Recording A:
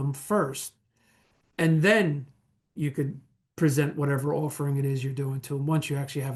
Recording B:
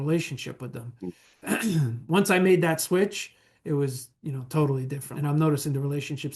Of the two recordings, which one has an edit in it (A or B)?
B